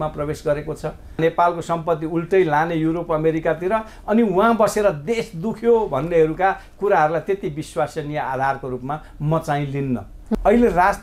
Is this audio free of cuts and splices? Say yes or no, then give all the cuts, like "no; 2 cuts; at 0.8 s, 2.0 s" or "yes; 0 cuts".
no; 2 cuts; at 1.2 s, 10.4 s